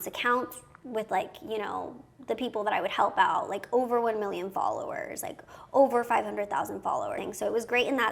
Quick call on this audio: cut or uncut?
cut